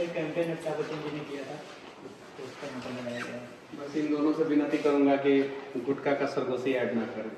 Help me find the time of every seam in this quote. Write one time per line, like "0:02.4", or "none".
none